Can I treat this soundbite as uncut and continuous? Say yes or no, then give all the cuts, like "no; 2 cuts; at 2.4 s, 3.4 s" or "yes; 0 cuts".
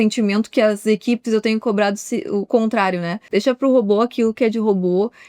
no; 1 cut; at 3.2 s